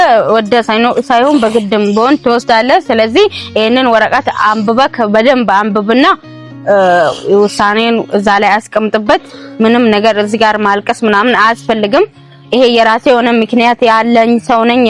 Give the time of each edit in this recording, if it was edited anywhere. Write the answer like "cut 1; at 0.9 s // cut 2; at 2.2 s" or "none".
none